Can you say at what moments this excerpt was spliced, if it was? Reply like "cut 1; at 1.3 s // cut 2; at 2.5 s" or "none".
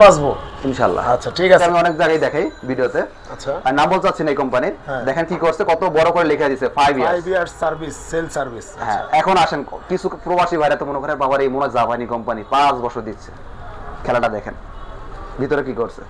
cut 1; at 1.6 s